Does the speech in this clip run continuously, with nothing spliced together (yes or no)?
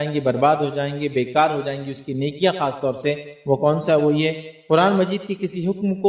yes